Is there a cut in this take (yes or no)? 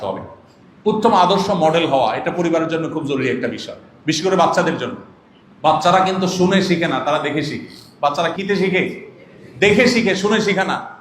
yes